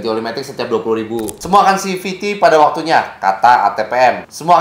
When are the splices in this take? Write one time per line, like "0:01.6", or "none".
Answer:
0:01.4